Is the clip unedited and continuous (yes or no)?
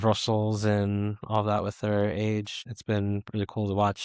no